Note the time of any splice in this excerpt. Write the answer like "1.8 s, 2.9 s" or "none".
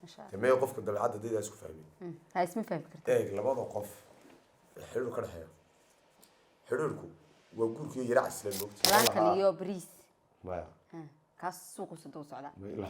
8.8 s